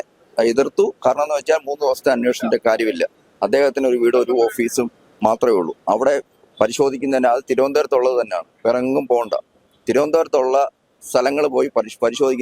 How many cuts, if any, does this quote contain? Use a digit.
0